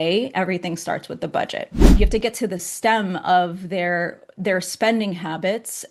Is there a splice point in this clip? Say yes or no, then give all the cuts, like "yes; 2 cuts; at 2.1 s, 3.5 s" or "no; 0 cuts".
yes; 1 cut; at 1.9 s